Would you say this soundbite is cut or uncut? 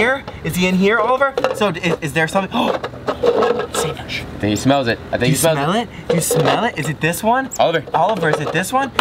uncut